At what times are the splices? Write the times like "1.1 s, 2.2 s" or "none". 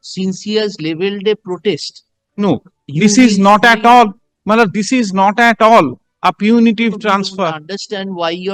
none